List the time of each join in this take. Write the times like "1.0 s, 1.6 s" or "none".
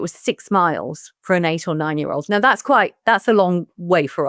none